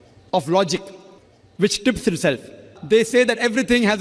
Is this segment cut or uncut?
cut